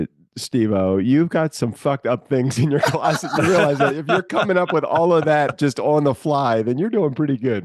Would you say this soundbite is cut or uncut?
uncut